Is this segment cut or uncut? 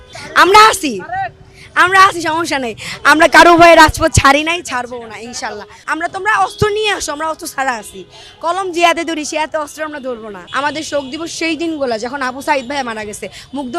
cut